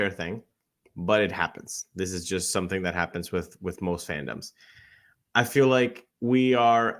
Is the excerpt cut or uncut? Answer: cut